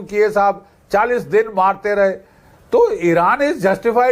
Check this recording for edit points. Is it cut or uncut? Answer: uncut